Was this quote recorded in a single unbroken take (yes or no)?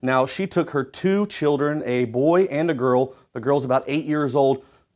no